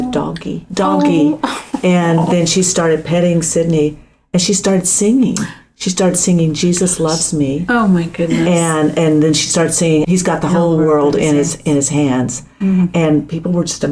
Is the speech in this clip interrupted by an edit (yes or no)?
no